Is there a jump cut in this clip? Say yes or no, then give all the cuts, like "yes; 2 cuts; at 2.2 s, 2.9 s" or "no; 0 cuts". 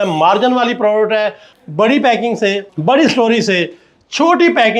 yes; 2 cuts; at 1.5 s, 2.7 s